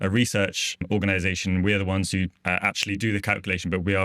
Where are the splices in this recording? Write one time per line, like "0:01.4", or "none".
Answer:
0:02.4